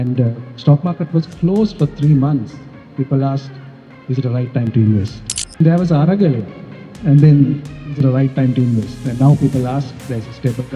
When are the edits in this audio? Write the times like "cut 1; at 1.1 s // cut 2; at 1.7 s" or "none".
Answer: cut 1; at 5.6 s